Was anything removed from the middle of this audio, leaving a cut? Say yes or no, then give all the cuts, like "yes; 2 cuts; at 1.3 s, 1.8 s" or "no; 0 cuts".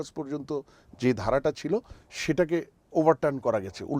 no; 0 cuts